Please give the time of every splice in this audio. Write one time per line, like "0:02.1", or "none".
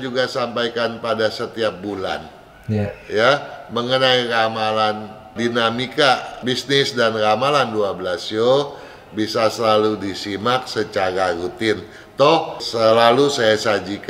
0:05.3
0:06.3
0:12.7